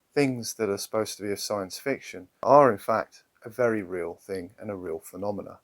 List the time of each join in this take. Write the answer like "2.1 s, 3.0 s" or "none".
2.4 s